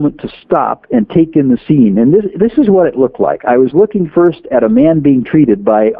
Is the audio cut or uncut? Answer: uncut